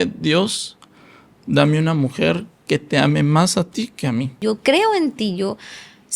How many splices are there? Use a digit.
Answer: 1